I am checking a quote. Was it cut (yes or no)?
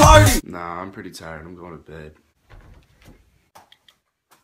no